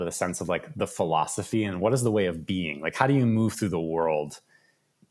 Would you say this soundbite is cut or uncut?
uncut